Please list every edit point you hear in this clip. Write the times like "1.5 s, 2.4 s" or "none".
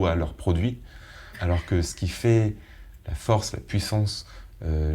1.4 s